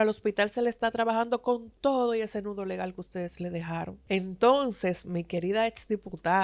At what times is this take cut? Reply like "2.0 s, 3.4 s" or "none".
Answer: 4.0 s